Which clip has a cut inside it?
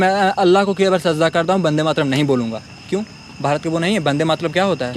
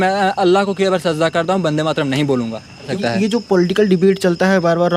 second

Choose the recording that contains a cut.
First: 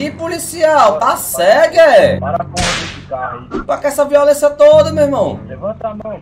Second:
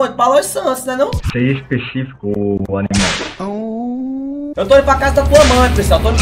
first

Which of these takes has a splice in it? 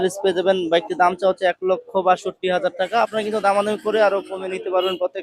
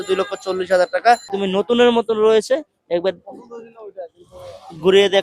second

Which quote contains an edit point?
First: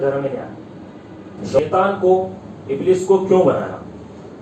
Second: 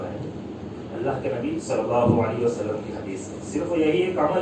first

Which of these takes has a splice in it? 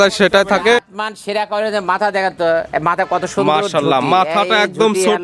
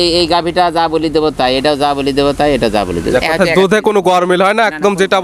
first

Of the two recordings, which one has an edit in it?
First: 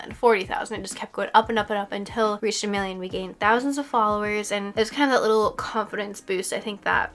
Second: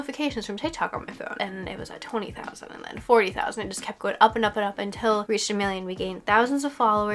second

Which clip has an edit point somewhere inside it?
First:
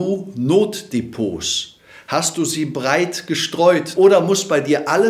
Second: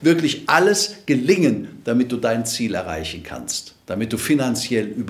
first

